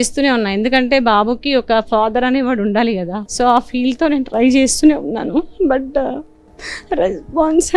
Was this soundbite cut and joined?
yes; 1 cut; at 3.2 s

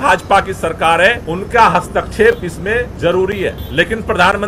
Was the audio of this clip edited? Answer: yes; 3 cuts; at 1.3 s, 2.9 s, 3.6 s

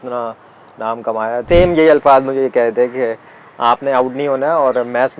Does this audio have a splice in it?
yes; 1 cut; at 1.4 s

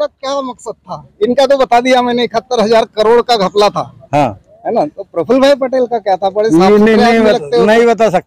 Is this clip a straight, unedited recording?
yes; 0 cuts

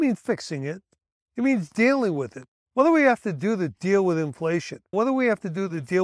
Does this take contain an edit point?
yes; 1 cut; at 4.8 s

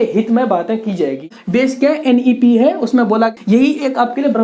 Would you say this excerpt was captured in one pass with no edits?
no; 2 cuts; at 1.3 s, 3.3 s

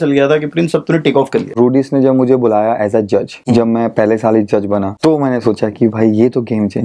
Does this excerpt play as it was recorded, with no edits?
no; 3 cuts; at 1.5 s, 3.3 s, 4.9 s

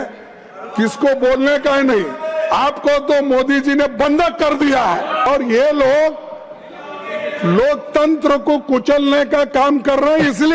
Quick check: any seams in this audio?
yes; 1 cut; at 5.3 s

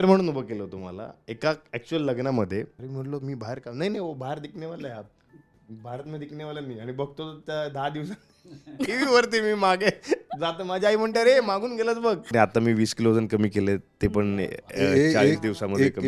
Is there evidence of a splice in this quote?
yes; 2 cuts; at 2.8 s, 12.3 s

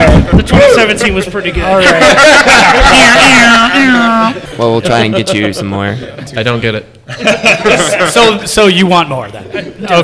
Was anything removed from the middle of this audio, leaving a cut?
yes; 2 cuts; at 4.4 s, 6.3 s

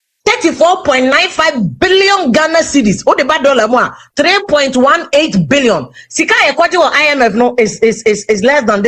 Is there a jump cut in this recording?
no; 0 cuts

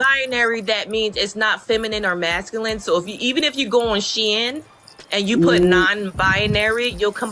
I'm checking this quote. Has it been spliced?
no; 0 cuts

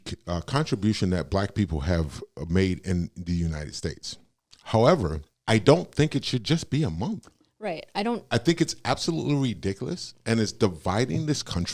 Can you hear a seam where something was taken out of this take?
yes; 1 cut; at 5.3 s

